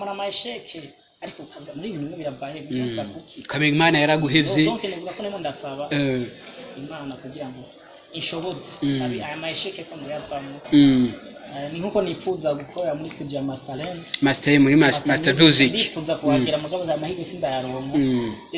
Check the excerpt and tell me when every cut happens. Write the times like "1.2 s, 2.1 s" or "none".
10.6 s

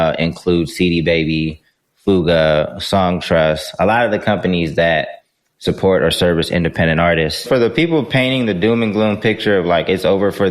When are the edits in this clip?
7.4 s

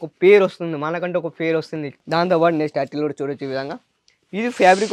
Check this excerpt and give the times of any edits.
none

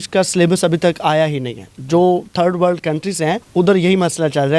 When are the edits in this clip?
3.4 s

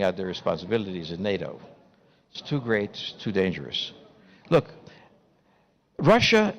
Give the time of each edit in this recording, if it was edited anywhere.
none

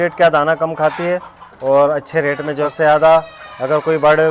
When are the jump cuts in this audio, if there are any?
2.7 s

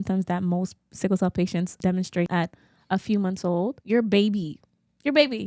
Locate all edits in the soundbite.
2.2 s, 3.8 s

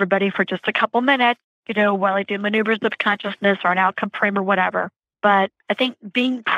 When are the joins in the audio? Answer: 1.5 s, 5.0 s, 5.6 s

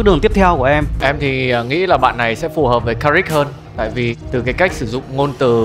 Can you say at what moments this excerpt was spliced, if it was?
1.0 s

